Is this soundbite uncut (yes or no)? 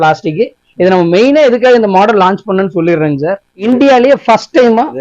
no